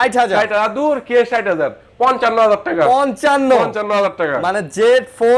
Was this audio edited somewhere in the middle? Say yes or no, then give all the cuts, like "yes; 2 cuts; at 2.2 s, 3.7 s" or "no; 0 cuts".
no; 0 cuts